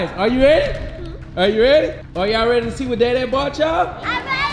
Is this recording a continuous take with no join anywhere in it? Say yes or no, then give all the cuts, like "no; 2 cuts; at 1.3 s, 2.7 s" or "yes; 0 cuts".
no; 1 cut; at 2.0 s